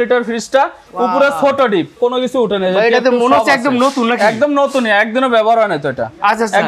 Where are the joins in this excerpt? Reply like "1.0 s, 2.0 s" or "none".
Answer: 2.0 s